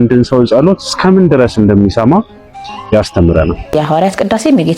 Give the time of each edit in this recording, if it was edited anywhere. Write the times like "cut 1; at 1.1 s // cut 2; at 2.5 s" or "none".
cut 1; at 3.6 s